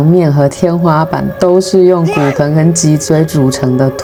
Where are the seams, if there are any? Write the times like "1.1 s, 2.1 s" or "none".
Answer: none

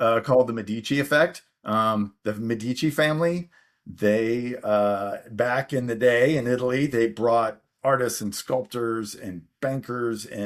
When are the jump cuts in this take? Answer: none

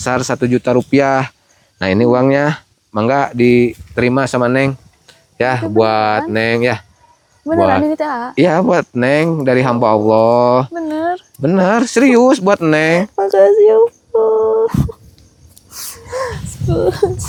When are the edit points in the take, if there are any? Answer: none

